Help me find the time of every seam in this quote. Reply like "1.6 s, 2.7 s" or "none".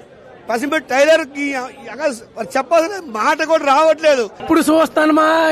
4.4 s